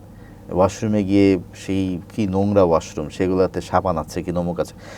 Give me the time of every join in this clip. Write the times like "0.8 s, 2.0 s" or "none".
none